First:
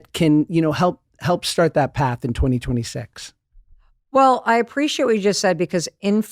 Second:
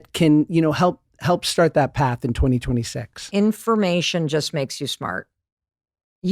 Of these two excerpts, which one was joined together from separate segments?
second; 1 cut; at 3.2 s

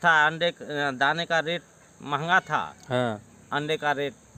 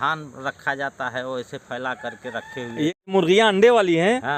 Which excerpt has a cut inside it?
second; 1 cut; at 3.0 s

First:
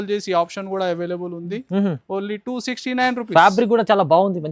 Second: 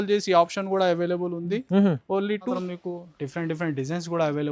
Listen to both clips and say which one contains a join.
second; 1 cut; at 2.6 s

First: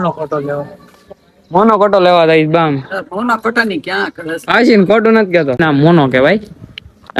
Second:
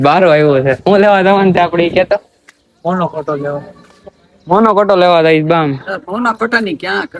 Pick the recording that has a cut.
first; 1 cut; at 5.6 s

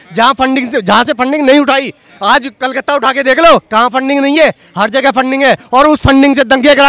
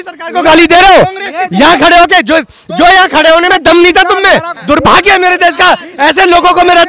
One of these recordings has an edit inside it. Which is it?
second; 1 cut; at 4.5 s

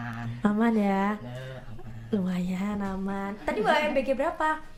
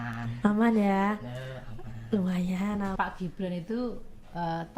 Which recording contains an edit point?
second; 1 cut; at 2.9 s

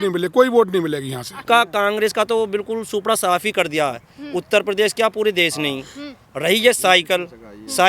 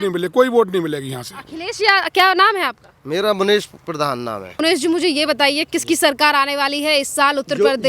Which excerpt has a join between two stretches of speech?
first; 1 cut; at 1.4 s

